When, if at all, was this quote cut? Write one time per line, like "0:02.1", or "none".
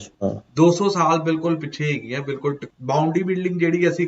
0:02.7